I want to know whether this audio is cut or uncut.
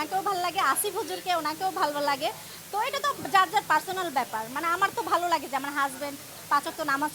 uncut